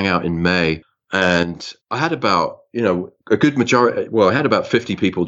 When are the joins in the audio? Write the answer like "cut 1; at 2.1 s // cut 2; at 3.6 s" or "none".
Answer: none